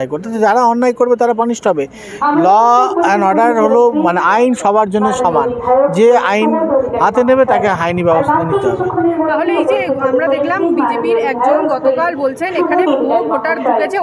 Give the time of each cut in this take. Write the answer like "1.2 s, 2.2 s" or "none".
none